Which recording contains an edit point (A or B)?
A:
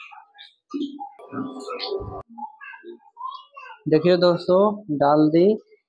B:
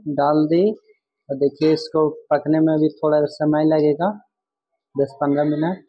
A